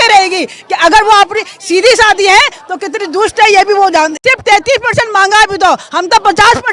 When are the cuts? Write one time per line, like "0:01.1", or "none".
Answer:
0:04.2